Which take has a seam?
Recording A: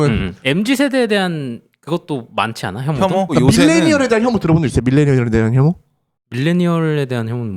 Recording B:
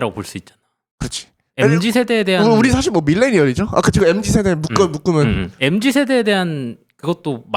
A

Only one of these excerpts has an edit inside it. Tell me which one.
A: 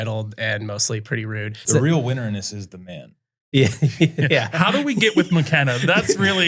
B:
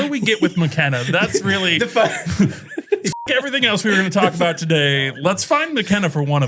A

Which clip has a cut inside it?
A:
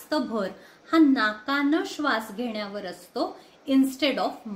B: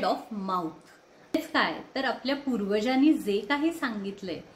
B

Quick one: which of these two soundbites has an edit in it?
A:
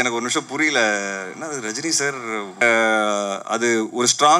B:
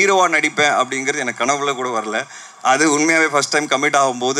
A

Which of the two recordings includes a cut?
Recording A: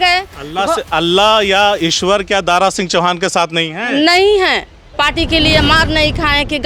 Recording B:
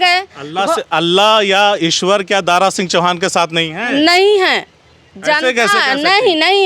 A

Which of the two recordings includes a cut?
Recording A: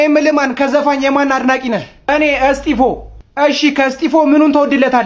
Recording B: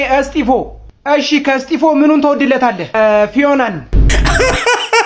B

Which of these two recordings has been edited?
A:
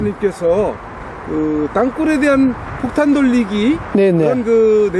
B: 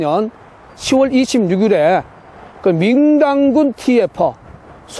A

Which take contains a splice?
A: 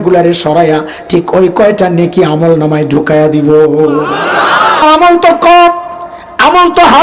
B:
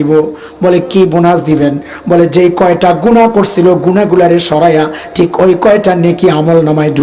A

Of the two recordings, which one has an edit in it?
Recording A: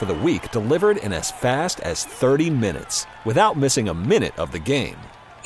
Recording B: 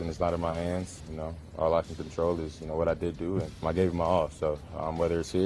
B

